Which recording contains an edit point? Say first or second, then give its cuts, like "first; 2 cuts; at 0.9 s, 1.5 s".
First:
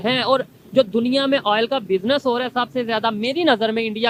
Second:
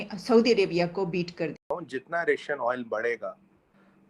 second; 1 cut; at 1.6 s